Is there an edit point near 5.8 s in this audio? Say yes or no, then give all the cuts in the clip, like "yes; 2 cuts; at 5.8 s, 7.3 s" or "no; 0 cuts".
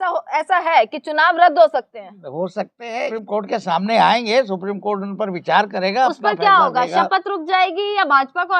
no; 1 cut; at 3.1 s